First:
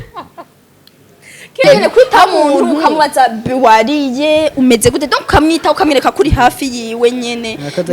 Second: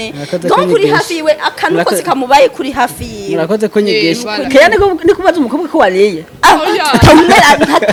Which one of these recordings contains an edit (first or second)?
first